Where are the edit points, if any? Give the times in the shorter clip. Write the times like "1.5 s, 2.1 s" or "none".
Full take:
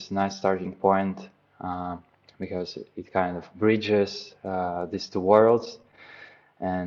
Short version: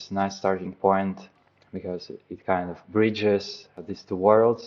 1.4 s, 3.7 s

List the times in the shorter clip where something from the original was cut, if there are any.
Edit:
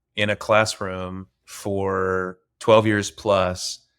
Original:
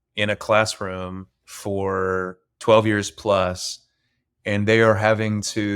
none

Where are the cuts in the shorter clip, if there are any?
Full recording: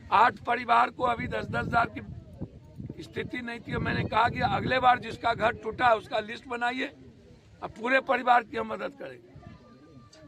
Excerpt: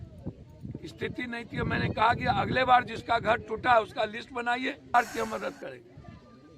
4.9 s

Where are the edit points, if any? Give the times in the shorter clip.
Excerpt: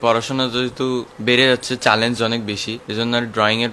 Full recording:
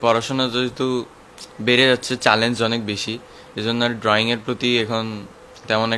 1.1 s, 2.8 s

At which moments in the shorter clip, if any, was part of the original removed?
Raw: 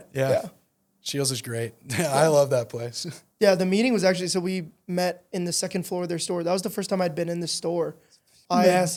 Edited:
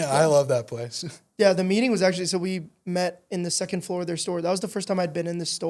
none

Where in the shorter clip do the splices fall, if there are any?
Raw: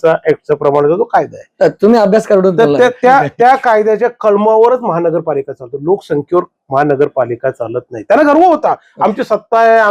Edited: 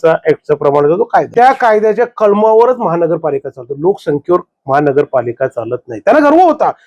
1.3 s

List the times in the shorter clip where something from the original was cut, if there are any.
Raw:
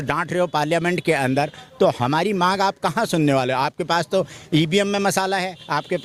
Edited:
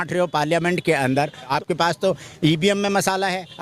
1.5 s

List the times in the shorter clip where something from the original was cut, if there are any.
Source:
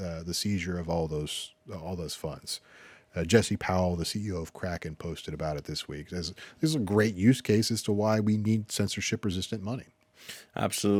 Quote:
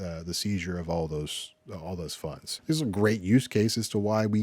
2.5 s

